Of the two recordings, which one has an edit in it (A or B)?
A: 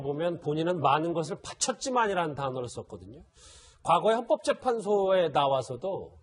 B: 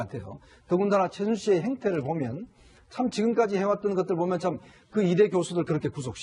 B